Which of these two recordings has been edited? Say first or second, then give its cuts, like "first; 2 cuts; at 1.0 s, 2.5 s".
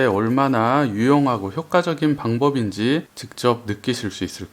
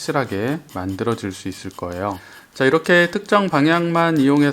second; 1 cut; at 2.4 s